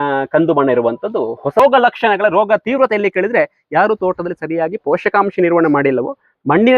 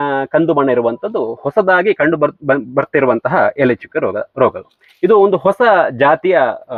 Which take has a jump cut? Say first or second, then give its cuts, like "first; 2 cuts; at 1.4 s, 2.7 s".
first; 1 cut; at 1.6 s